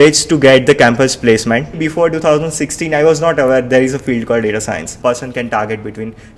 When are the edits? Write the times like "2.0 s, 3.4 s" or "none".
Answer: 1.7 s, 4.9 s